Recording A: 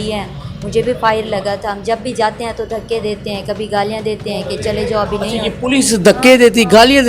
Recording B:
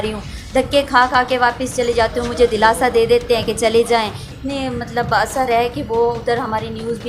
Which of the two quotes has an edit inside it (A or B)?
B